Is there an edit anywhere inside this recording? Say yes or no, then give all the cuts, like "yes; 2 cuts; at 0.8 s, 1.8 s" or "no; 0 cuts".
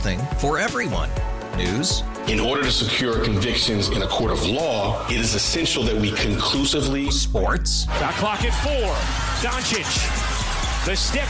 no; 0 cuts